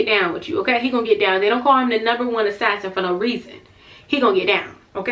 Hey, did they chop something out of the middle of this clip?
no; 0 cuts

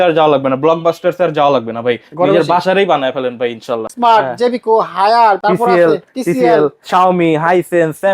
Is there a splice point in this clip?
yes; 2 cuts; at 3.9 s, 5.4 s

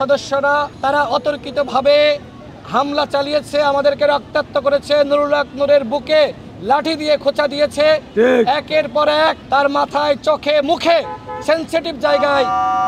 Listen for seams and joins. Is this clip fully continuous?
yes; 0 cuts

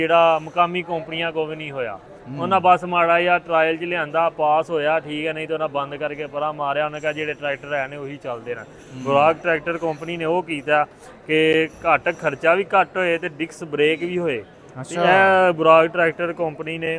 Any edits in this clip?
no; 0 cuts

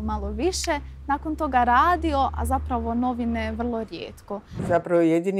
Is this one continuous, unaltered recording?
no; 1 cut; at 4.5 s

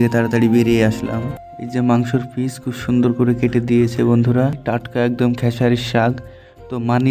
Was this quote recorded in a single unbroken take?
no; 2 cuts; at 1.4 s, 4.6 s

